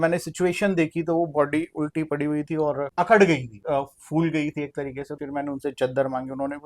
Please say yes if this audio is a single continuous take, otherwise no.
no